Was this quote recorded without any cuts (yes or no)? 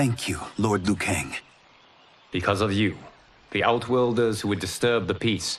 yes